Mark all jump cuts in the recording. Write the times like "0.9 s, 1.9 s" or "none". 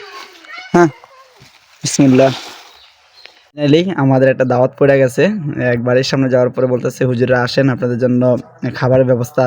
3.5 s